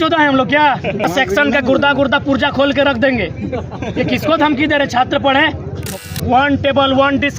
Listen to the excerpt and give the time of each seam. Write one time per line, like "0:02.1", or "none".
0:01.1
0:05.9